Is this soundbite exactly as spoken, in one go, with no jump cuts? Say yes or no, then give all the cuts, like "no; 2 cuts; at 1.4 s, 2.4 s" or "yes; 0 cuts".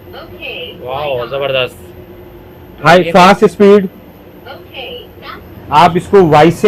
yes; 0 cuts